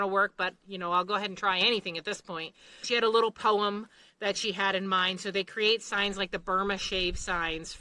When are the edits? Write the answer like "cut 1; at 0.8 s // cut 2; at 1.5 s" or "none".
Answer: cut 1; at 2.8 s